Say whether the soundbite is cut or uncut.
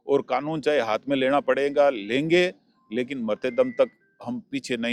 uncut